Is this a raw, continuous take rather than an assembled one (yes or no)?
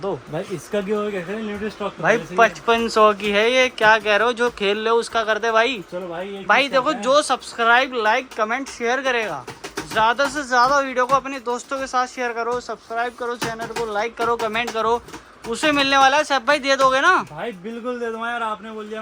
yes